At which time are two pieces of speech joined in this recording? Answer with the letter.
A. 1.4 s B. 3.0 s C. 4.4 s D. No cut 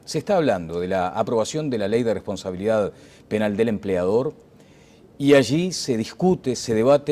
C